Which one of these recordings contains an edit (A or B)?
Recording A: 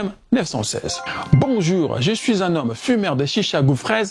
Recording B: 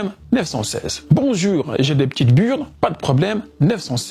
A